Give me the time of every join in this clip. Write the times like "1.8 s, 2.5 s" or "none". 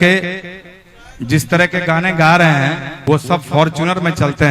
2.9 s

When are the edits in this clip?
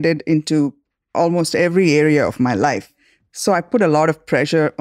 3.0 s

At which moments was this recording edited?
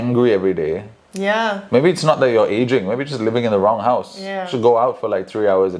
none

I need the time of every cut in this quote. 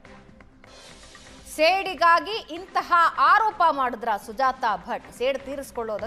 1.5 s

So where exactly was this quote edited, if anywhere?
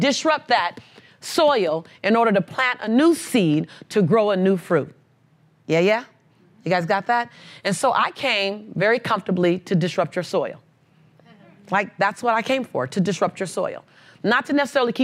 none

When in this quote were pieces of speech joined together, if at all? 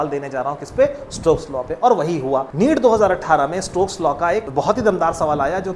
2.5 s, 4.5 s

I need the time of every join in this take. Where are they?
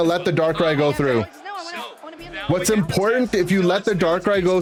none

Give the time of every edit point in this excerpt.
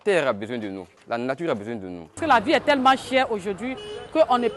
0.9 s, 2.2 s

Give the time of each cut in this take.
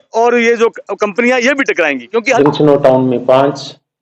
2.4 s

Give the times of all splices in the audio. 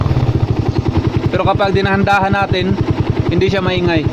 1.0 s

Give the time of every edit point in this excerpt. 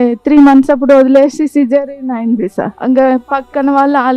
2.7 s

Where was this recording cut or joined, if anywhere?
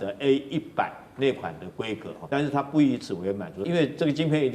2.1 s, 3.6 s

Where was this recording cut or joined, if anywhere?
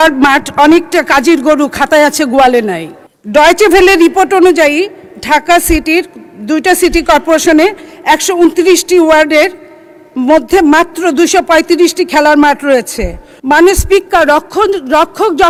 none

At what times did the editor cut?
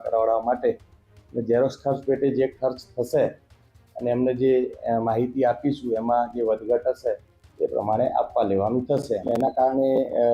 9.2 s

